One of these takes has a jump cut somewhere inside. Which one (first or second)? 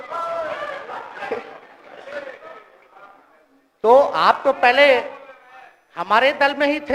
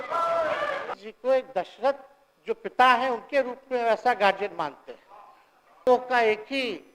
second